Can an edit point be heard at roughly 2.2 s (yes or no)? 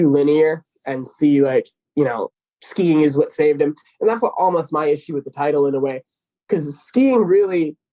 yes